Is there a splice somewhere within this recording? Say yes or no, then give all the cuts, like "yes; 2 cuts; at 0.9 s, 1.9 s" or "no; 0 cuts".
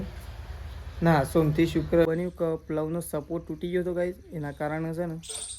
yes; 1 cut; at 2.1 s